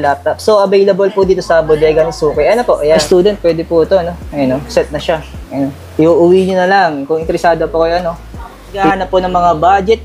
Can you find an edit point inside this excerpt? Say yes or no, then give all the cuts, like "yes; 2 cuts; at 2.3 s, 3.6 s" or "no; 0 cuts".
yes; 2 cuts; at 3.0 s, 8.8 s